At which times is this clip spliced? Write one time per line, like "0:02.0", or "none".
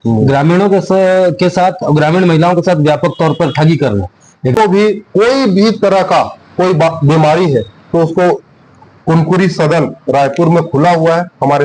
0:04.5